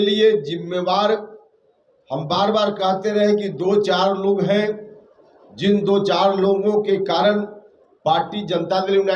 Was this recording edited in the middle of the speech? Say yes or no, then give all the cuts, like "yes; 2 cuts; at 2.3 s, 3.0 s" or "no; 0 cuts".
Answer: no; 0 cuts